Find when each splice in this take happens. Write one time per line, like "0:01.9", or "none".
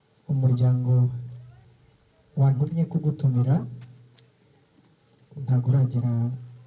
none

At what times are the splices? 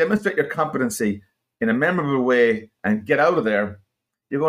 none

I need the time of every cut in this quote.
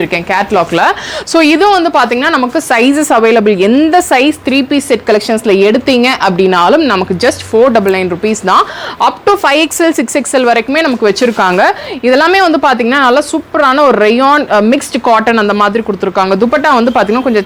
none

